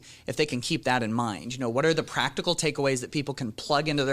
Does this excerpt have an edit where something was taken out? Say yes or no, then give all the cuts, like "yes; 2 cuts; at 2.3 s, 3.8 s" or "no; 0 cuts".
no; 0 cuts